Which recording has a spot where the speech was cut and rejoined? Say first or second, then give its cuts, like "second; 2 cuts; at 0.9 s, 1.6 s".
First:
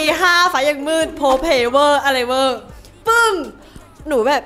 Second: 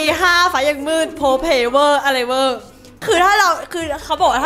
second; 1 cut; at 2.9 s